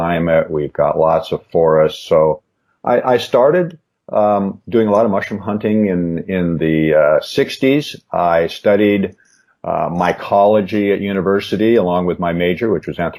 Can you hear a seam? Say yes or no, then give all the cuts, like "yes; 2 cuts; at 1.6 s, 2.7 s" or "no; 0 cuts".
no; 0 cuts